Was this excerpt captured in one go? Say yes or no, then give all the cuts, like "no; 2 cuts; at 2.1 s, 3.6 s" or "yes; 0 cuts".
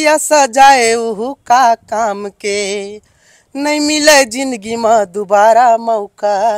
yes; 0 cuts